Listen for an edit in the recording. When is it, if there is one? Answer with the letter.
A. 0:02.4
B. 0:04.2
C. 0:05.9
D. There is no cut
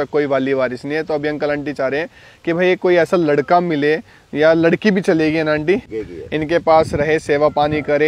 C